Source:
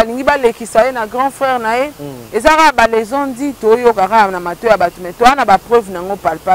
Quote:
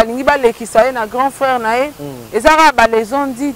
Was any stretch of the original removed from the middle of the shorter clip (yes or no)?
no